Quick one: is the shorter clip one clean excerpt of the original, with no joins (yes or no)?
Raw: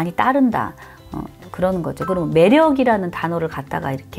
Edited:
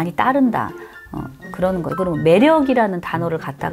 no